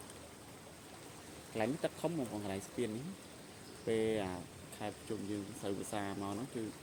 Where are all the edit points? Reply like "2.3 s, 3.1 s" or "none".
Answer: none